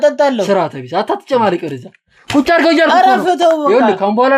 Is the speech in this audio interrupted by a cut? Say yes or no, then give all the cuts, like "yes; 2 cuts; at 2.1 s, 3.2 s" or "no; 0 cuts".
no; 0 cuts